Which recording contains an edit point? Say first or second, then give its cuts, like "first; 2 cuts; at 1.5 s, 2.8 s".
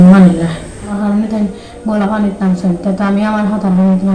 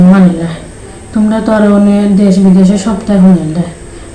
first; 1 cut; at 0.9 s